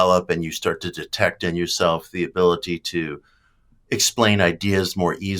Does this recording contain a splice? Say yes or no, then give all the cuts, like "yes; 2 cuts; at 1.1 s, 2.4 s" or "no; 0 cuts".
no; 0 cuts